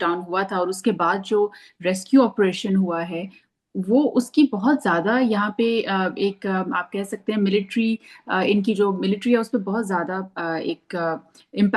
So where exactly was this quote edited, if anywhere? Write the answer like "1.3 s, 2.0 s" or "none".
none